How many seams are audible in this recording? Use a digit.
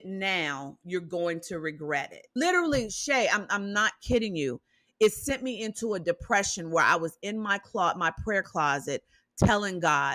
1